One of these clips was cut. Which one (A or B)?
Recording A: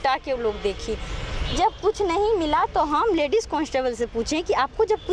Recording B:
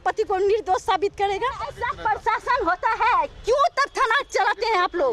B